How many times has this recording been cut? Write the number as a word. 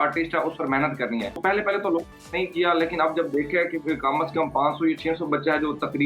two